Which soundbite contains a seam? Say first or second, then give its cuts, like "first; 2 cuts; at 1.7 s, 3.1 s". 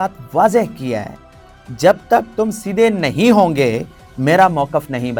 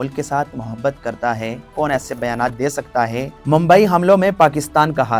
second; 2 cuts; at 1.7 s, 3.3 s